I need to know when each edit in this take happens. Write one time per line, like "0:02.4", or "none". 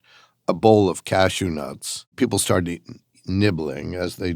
0:02.1